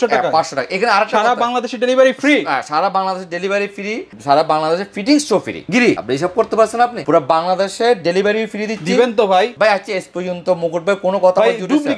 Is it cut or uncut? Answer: uncut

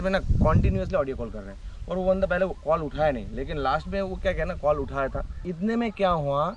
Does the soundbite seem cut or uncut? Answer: cut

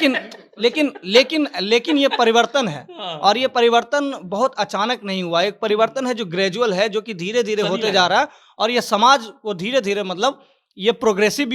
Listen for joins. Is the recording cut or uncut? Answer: uncut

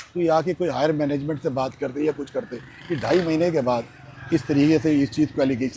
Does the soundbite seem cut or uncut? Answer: uncut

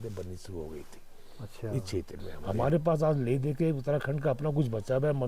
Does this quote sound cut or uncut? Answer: cut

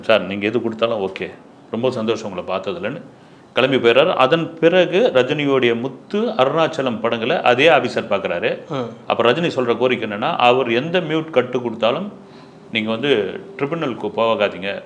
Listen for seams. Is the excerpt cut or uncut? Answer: uncut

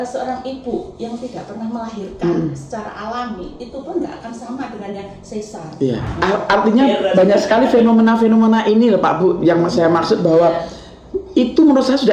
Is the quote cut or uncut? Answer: cut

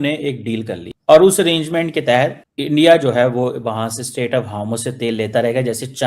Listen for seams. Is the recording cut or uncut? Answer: uncut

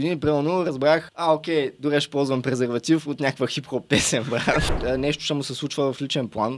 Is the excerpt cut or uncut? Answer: cut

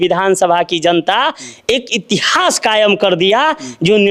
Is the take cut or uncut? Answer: uncut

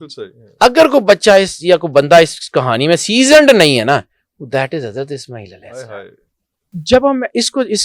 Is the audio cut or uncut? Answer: cut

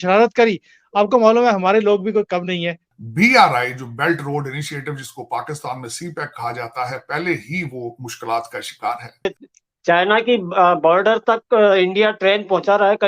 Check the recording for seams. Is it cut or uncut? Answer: cut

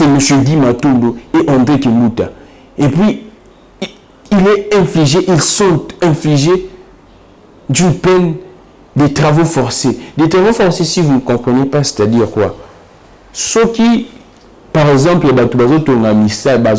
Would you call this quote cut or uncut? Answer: uncut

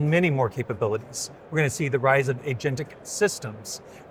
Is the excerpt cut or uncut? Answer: uncut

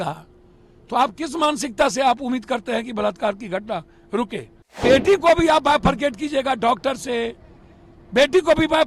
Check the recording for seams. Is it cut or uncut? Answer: cut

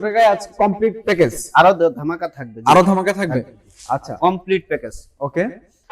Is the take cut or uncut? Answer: uncut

